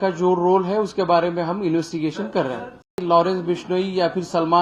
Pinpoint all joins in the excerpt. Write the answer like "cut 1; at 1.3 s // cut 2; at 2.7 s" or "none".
cut 1; at 2.9 s